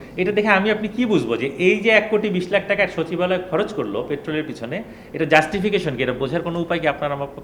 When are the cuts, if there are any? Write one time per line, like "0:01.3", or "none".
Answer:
none